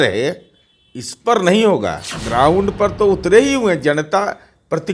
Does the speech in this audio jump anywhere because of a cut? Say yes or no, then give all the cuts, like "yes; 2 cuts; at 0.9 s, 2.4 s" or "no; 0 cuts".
yes; 1 cut; at 2.2 s